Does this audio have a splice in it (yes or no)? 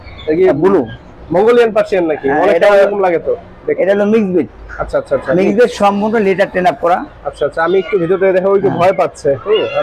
no